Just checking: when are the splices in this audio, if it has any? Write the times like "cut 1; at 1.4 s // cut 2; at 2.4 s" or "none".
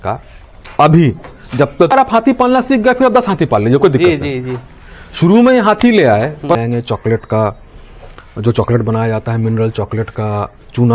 cut 1; at 1.9 s // cut 2; at 6.6 s